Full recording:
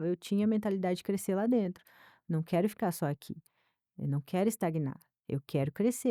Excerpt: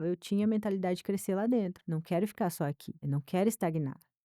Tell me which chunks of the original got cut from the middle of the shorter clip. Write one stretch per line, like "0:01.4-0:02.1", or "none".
0:01.8-0:02.2
0:03.3-0:03.9

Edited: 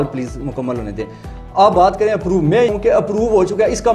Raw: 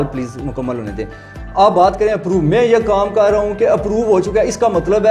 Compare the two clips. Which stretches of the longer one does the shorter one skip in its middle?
0:02.7-0:03.4

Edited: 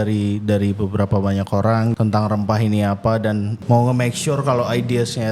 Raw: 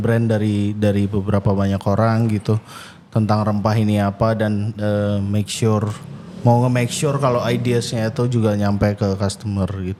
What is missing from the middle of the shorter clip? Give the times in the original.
0:02.3-0:03.1
0:04.7-0:06.3

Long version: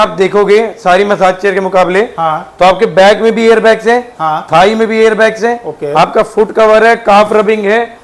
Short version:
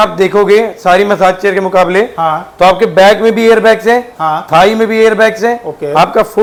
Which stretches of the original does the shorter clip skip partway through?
none

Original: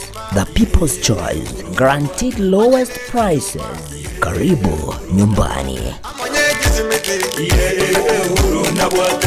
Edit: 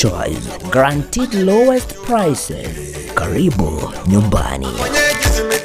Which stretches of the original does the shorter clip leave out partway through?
0:05.8-0:06.1

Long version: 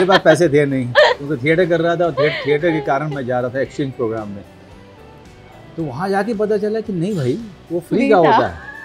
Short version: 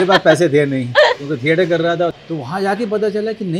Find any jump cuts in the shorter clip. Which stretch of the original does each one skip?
0:02.1-0:05.6

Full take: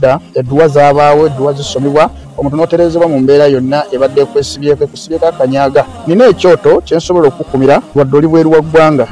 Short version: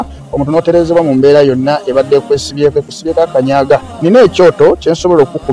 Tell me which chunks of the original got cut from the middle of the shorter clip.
none

